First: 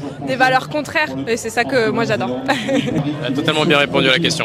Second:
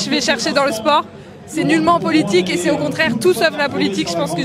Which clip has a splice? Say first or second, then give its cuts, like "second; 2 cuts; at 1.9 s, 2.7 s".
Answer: first; 2 cuts; at 1.2 s, 3.0 s